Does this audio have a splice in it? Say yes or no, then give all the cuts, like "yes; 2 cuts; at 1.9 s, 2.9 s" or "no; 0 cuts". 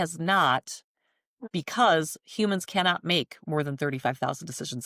no; 0 cuts